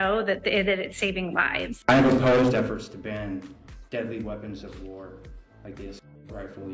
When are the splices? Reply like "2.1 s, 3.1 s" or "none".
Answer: none